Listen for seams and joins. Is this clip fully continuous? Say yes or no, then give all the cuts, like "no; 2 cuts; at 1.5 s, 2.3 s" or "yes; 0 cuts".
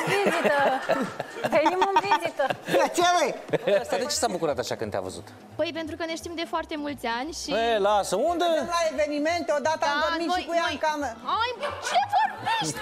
no; 1 cut; at 3.9 s